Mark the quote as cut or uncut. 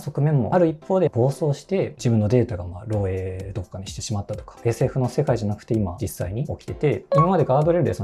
cut